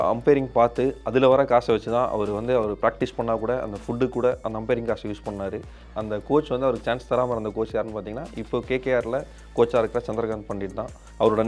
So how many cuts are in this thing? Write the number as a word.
one